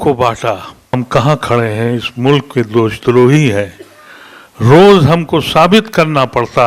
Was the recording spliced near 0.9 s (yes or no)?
yes